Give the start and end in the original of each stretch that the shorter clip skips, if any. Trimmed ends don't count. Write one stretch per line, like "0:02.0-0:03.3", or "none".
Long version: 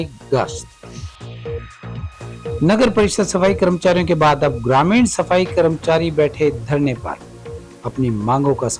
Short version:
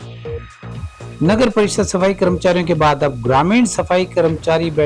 0:02.4-0:02.6